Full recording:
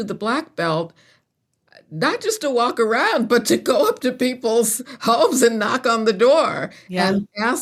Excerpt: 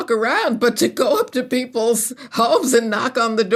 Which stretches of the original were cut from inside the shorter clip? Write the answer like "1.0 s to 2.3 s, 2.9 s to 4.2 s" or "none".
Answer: none

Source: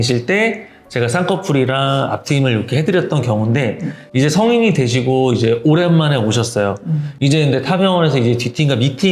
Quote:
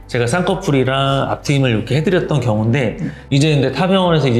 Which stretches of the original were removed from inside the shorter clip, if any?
3.9 s to 7.0 s

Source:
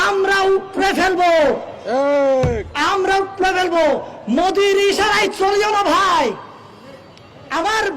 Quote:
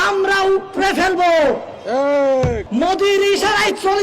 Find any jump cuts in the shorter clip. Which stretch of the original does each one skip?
2.6 s to 4.2 s

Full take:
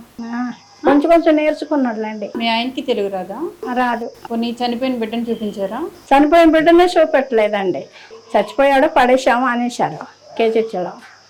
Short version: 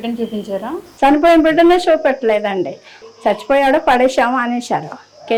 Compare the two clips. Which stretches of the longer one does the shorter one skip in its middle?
none

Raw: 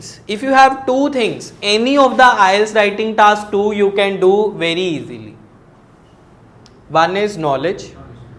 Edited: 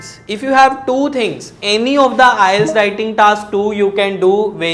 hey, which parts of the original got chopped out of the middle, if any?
none

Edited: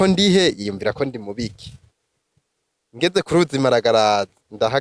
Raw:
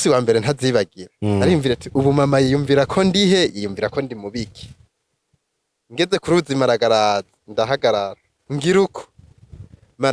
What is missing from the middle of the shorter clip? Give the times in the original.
none

